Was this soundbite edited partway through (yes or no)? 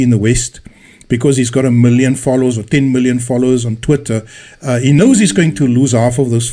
yes